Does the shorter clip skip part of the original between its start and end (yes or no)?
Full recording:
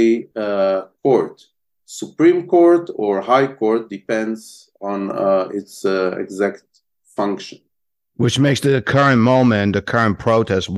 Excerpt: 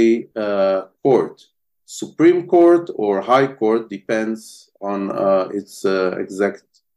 no